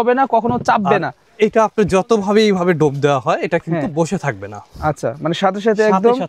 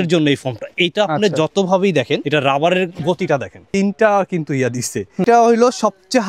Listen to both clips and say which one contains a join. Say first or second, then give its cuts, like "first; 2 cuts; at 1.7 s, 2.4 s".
second; 3 cuts; at 2.2 s, 3.6 s, 5.2 s